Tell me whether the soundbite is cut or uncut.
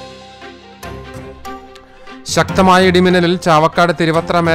cut